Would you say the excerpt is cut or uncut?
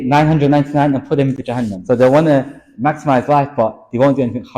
cut